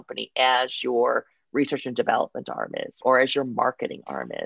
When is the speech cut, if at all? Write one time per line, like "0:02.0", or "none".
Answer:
0:03.0